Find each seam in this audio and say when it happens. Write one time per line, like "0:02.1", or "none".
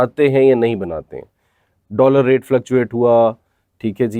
none

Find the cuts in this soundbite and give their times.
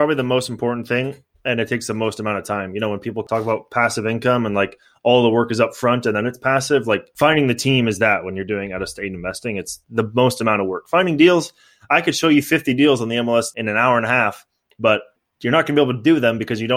0:03.2
0:07.1
0:13.5

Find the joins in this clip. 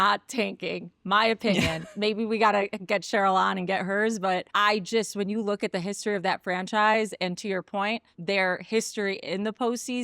0:04.5
0:08.1

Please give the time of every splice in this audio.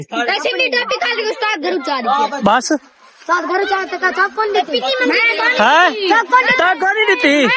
none

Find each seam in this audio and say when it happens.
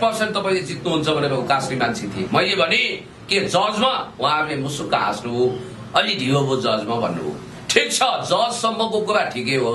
none

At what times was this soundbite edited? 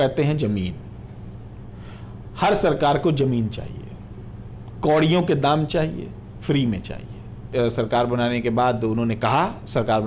0:07.5

